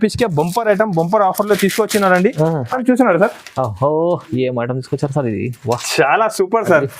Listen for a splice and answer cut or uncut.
cut